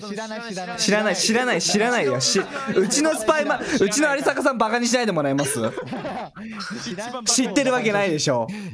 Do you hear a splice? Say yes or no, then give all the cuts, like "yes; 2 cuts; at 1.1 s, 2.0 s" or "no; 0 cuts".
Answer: no; 0 cuts